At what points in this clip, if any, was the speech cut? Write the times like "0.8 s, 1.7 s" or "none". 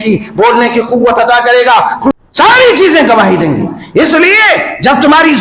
2.1 s